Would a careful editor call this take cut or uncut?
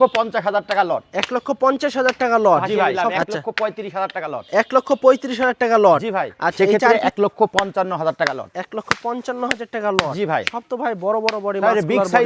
cut